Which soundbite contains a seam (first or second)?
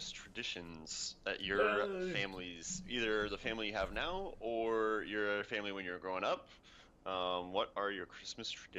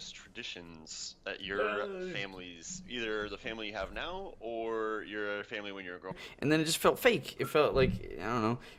first